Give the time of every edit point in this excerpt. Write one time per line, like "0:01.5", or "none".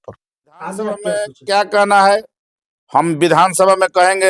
0:01.1